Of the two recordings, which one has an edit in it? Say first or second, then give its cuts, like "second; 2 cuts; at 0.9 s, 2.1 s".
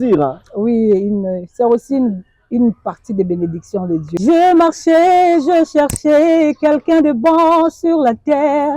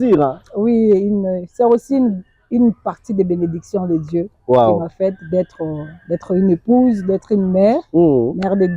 first; 1 cut; at 4.1 s